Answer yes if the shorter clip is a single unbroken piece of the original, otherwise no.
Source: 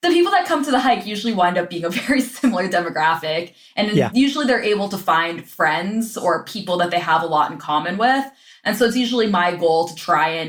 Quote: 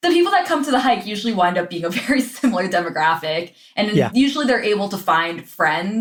yes